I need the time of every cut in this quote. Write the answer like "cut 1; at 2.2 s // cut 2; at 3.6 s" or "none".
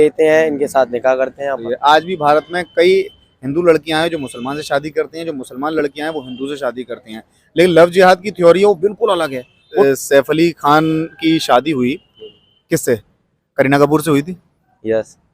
cut 1; at 1.6 s // cut 2; at 9.8 s

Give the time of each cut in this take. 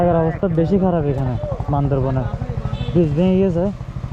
none

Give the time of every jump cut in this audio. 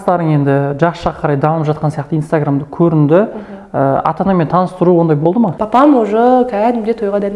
cut 1; at 5.6 s

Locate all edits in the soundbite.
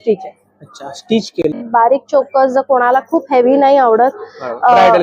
cut 1; at 1.7 s

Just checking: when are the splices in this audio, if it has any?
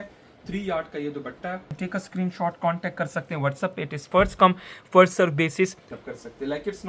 cut 1; at 1.7 s // cut 2; at 5.9 s

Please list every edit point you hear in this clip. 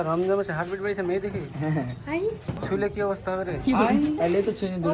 cut 1; at 2.6 s

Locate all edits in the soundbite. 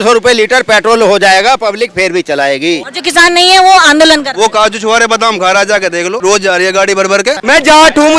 cut 1; at 2.9 s // cut 2; at 6.2 s // cut 3; at 7.4 s

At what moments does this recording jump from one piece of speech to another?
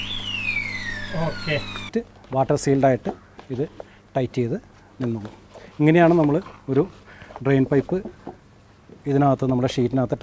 cut 1; at 1.9 s

